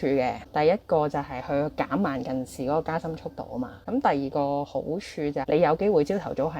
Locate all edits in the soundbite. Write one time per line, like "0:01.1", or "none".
0:03.8
0:05.4